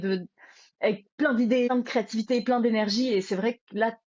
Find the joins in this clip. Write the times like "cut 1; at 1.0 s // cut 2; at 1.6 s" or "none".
cut 1; at 1.7 s